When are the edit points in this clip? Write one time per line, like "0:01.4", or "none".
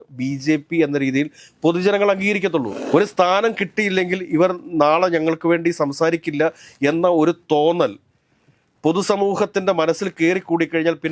0:02.8